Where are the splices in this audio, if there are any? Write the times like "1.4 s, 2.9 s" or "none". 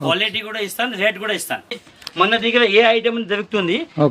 1.8 s